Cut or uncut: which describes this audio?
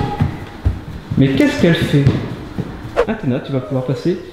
cut